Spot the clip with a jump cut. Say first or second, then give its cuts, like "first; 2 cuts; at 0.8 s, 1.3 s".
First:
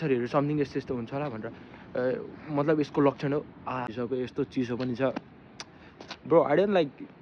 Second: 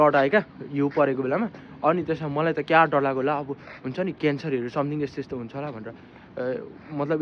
first; 1 cut; at 3.9 s